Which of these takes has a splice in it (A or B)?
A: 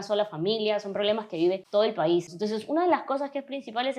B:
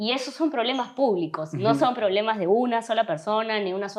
A